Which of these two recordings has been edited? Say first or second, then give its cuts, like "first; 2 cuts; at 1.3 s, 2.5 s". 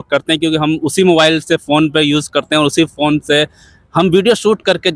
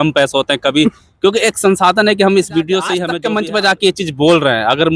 second; 1 cut; at 3.1 s